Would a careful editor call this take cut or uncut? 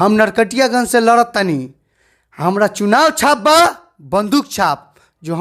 uncut